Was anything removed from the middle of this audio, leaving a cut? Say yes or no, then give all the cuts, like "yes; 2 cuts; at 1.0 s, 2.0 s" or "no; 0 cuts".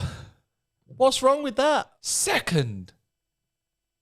yes; 1 cut; at 2.0 s